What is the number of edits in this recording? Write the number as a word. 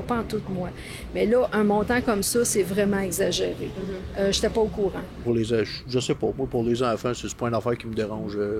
one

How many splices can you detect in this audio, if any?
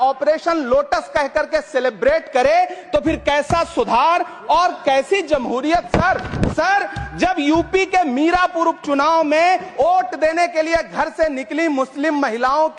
zero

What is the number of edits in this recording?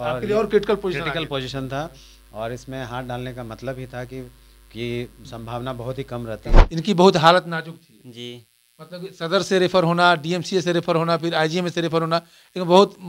one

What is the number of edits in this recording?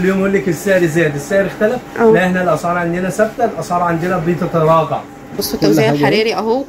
one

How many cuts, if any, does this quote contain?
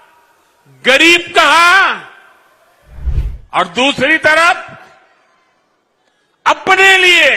one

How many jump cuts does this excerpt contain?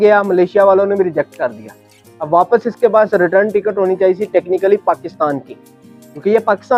zero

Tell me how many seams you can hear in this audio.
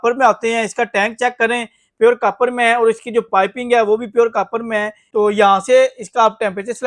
one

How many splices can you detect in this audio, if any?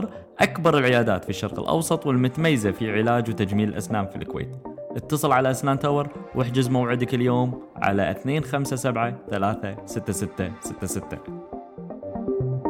one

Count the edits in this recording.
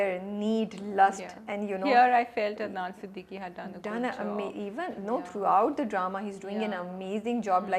zero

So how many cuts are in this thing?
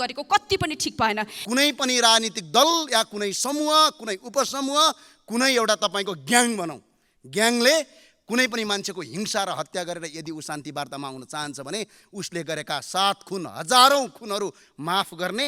one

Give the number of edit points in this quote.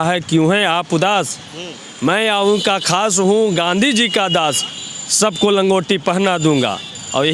zero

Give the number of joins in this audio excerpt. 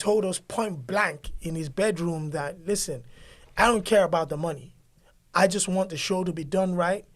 zero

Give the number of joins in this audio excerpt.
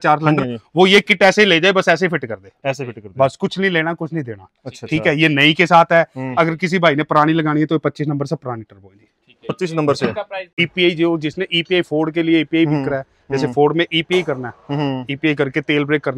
one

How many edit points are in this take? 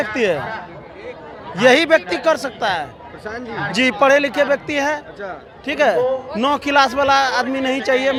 zero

